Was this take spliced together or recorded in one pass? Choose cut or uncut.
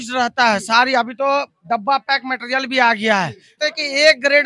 cut